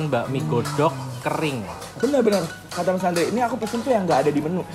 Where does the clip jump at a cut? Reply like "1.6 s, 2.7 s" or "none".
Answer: 2.0 s